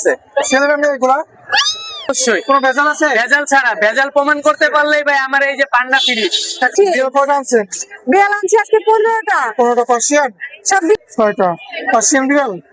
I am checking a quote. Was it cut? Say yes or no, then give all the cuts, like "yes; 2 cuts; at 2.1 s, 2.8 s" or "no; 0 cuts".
yes; 3 cuts; at 2.2 s, 6.7 s, 11.1 s